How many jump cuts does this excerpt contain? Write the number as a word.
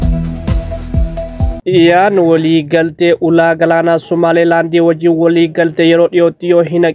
one